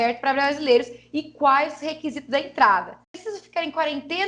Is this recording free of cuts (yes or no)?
no